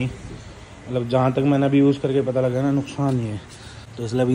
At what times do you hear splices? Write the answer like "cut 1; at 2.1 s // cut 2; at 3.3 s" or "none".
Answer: none